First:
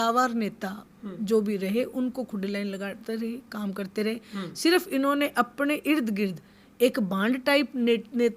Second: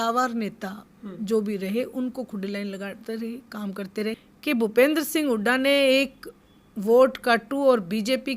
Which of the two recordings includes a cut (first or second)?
second